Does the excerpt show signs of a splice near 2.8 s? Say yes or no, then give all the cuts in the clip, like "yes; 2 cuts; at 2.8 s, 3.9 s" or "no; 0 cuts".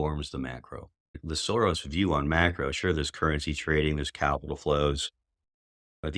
no; 1 cut; at 1.3 s